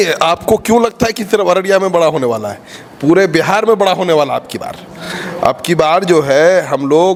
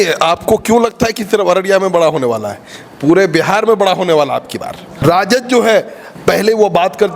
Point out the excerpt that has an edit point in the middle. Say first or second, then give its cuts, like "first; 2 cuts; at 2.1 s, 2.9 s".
second; 2 cuts; at 5.0 s, 6.0 s